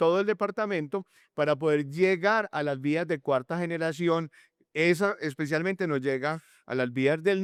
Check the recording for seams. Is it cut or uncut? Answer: uncut